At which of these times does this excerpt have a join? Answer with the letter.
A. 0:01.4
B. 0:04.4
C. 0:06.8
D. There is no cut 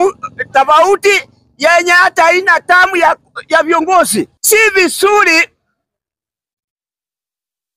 B